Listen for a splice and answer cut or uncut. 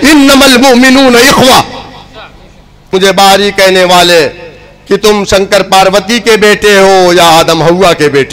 cut